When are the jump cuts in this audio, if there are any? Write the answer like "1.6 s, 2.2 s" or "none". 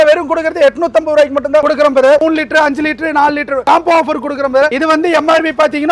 2.2 s, 3.6 s, 4.7 s